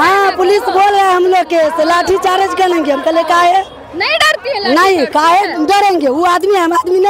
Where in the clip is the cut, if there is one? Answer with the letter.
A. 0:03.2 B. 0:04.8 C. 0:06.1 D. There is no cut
D